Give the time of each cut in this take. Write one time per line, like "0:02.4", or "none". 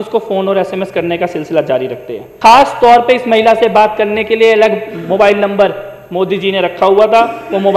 0:02.2